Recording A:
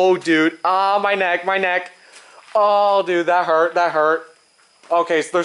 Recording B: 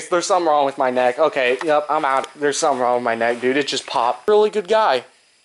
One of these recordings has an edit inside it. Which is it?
B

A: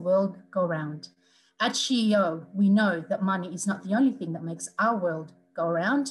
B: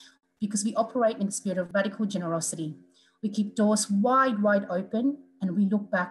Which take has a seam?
B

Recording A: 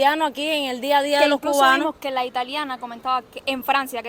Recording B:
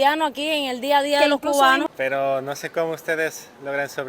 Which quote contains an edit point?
B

